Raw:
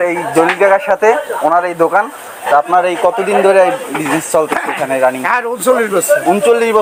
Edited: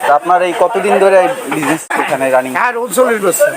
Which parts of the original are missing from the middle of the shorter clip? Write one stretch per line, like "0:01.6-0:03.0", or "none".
0:04.3-0:04.5